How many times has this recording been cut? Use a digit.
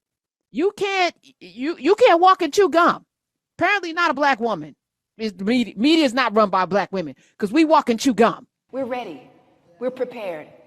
1